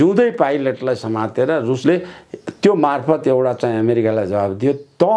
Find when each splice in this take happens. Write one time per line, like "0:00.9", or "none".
0:01.8